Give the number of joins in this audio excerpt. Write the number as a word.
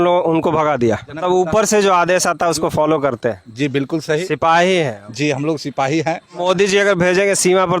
two